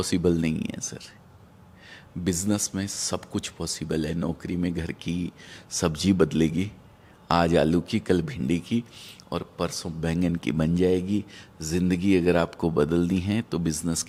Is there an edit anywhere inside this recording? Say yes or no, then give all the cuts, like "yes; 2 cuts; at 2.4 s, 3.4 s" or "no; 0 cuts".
no; 0 cuts